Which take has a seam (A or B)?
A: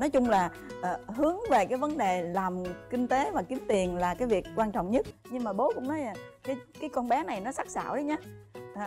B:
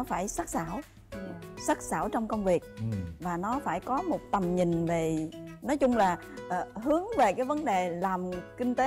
A